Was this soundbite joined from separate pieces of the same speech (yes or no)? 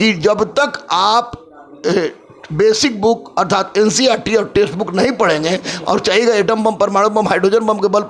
no